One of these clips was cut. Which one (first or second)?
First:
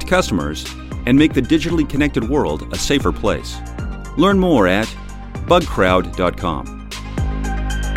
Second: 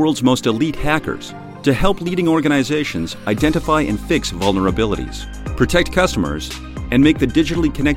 first